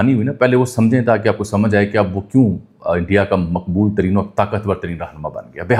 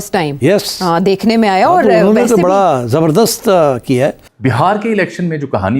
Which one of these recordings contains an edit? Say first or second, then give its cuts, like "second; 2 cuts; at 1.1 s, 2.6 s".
second; 1 cut; at 4.2 s